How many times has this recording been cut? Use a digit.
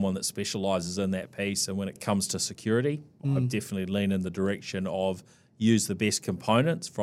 2